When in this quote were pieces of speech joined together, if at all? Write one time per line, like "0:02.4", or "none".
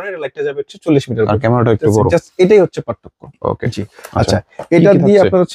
none